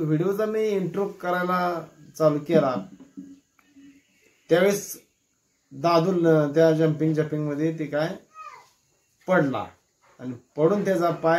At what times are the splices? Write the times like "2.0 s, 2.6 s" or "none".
none